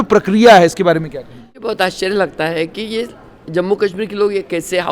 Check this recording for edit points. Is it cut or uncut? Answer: cut